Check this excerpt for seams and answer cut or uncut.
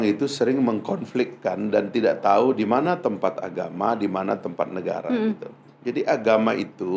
uncut